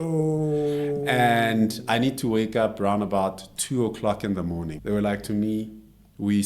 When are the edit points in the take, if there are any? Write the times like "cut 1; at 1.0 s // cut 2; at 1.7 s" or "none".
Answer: cut 1; at 4.7 s